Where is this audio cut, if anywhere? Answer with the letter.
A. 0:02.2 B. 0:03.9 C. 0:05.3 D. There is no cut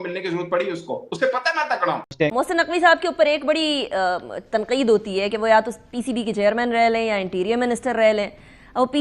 A